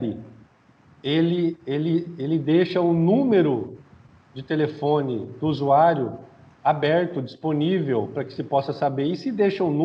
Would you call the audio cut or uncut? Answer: uncut